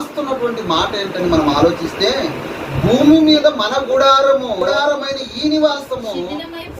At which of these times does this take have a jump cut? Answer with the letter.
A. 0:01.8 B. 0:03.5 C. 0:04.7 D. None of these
C